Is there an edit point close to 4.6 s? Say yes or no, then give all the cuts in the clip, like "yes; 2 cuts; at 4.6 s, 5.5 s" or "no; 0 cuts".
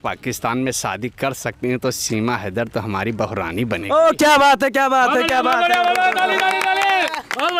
no; 0 cuts